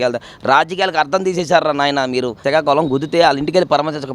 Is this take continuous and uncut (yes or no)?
no